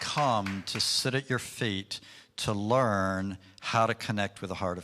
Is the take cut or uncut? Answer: uncut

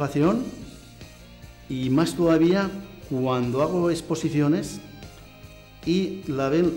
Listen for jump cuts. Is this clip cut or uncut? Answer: uncut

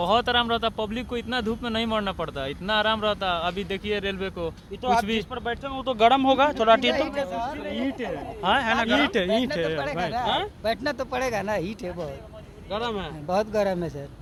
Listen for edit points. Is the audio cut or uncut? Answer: uncut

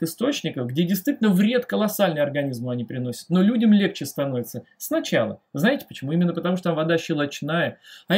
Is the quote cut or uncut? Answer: uncut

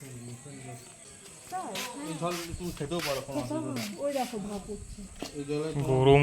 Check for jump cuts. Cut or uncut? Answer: cut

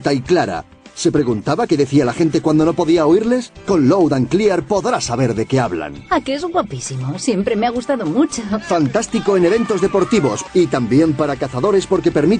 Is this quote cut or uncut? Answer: cut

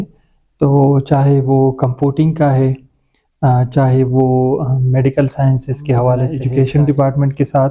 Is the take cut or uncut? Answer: cut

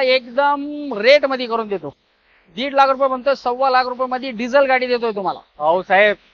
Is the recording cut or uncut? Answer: uncut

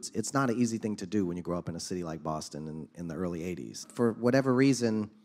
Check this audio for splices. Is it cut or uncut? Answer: cut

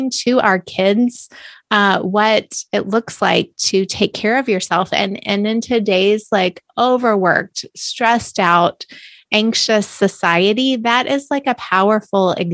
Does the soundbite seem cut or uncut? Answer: uncut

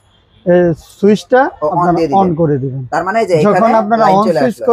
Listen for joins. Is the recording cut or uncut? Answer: uncut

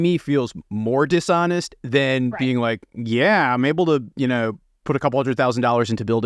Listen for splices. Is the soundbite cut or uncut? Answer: uncut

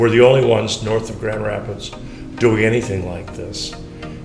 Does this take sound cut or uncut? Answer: uncut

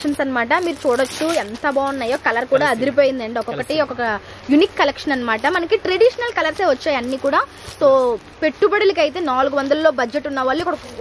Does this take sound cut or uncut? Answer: uncut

